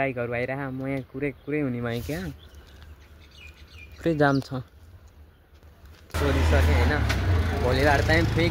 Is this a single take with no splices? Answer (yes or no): no